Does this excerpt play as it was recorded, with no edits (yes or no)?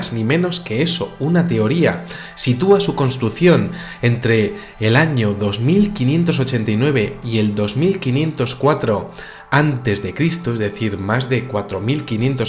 yes